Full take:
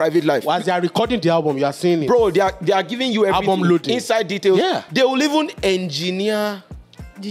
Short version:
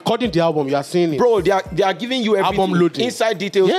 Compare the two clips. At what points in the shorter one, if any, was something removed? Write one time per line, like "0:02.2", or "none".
none